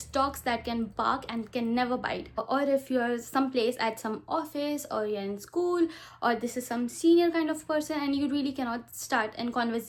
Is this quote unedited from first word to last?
yes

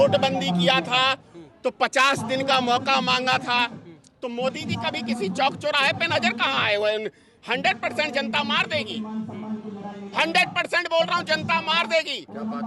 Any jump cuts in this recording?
no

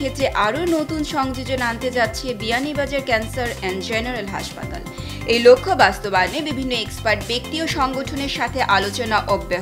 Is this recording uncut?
yes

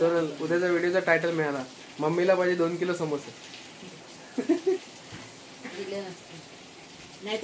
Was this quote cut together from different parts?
no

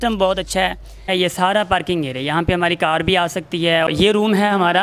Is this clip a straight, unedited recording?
no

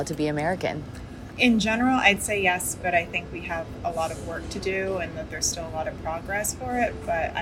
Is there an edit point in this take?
no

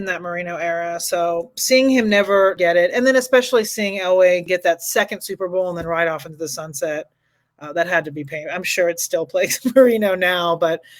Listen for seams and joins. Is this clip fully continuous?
no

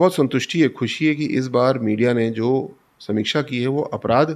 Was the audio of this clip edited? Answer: no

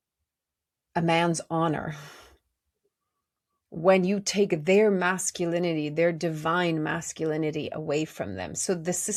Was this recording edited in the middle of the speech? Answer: no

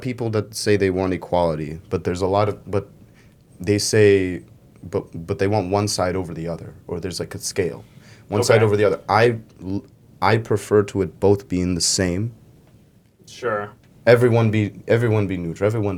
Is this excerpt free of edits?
yes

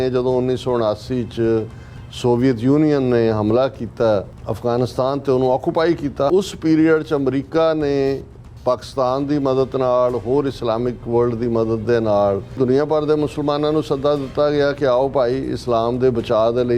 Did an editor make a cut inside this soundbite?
yes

